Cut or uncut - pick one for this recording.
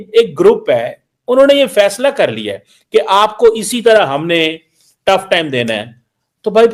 uncut